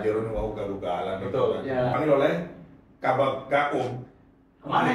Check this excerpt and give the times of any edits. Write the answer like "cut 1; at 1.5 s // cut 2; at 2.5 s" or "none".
cut 1; at 1.9 s